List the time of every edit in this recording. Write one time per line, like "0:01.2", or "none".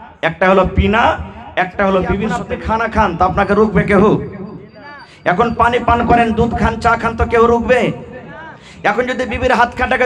0:02.5